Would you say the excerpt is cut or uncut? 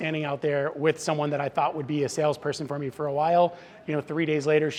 uncut